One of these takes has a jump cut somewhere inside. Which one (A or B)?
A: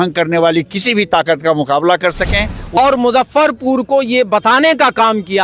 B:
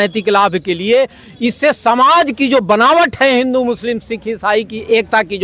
A